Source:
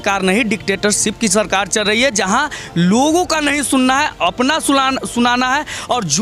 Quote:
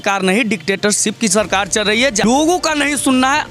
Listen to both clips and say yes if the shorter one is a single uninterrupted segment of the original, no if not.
no